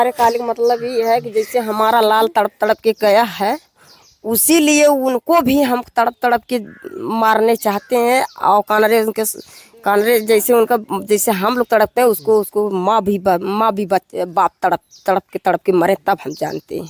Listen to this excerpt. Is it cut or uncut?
uncut